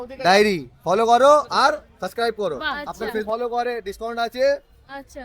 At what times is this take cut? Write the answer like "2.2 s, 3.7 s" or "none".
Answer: 3.3 s